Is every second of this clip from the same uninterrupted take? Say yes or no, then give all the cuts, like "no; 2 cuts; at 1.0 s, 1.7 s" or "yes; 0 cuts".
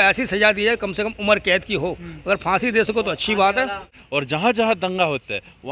no; 1 cut; at 3.9 s